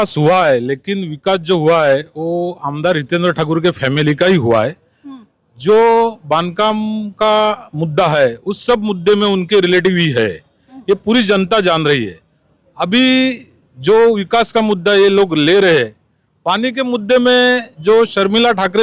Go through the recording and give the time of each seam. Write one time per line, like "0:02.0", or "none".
none